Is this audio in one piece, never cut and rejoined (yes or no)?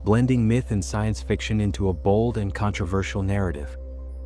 yes